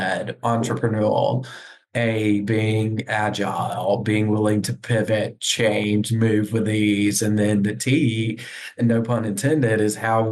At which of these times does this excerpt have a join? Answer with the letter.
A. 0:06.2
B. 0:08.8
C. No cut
B